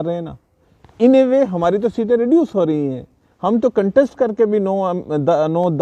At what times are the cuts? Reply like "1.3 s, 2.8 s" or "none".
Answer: none